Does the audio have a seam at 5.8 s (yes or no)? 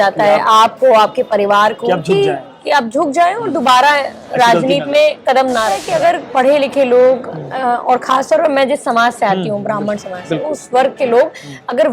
yes